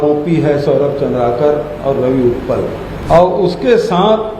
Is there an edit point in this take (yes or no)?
yes